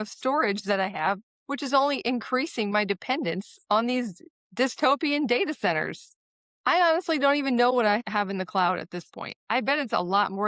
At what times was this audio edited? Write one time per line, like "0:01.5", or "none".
none